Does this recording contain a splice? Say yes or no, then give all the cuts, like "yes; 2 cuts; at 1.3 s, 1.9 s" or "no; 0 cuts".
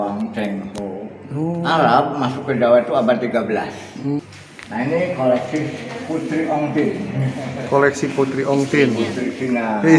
yes; 1 cut; at 4.2 s